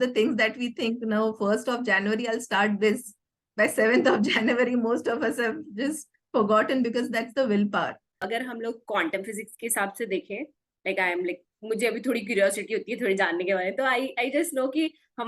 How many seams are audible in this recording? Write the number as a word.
one